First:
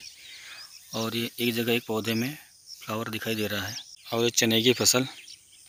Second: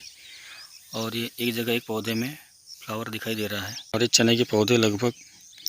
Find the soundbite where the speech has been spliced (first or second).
second